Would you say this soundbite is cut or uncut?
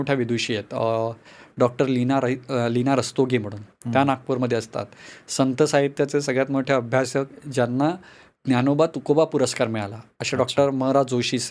uncut